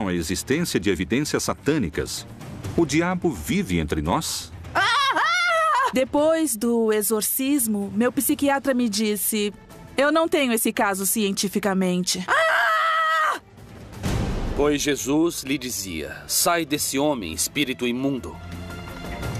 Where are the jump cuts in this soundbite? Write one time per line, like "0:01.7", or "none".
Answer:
none